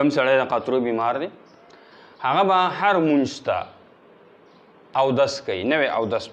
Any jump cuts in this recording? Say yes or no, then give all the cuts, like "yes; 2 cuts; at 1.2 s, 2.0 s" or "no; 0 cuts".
no; 0 cuts